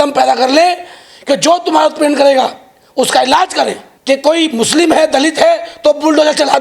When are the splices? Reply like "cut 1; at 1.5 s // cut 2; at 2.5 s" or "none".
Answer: cut 1; at 3.9 s